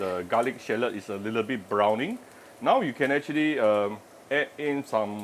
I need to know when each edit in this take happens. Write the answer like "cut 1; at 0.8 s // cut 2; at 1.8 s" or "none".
cut 1; at 4.1 s